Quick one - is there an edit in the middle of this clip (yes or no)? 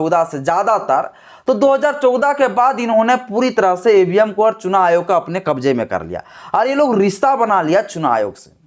no